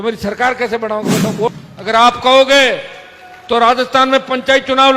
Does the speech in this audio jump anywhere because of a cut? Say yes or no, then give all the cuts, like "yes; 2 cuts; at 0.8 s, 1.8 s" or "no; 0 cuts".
yes; 1 cut; at 1.5 s